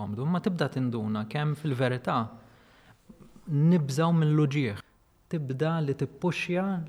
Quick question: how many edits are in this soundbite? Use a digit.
1